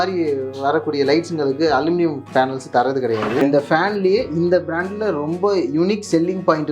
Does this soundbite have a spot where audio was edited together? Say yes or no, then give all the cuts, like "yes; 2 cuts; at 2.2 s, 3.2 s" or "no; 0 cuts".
yes; 1 cut; at 3.4 s